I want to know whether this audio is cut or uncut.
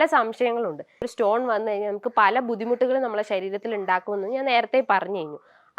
cut